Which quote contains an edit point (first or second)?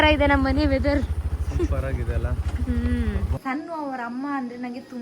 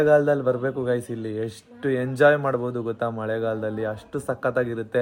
first